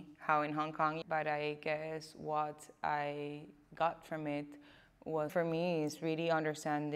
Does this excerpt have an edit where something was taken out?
yes; 2 cuts; at 1.0 s, 5.3 s

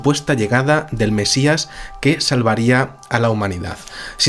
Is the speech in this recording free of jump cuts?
no; 1 cut; at 2.6 s

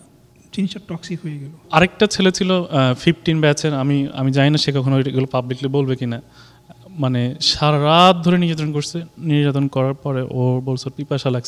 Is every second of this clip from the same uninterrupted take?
no; 1 cut; at 1.6 s

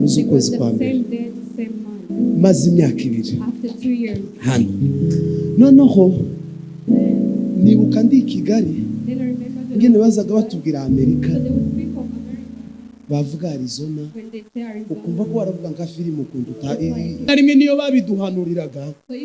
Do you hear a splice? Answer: yes; 1 cut; at 17.3 s

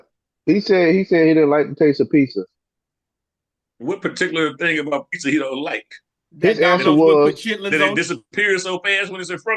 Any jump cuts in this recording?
no; 0 cuts

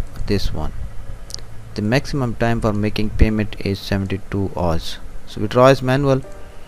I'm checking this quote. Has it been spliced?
no; 0 cuts

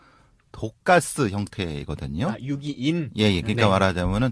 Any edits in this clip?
yes; 1 cut; at 1.2 s

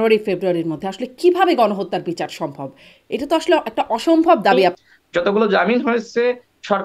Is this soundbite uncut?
no; 1 cut; at 4.8 s

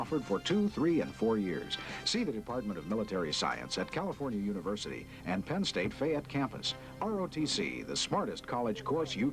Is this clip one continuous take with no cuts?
no; 1 cut; at 6.3 s

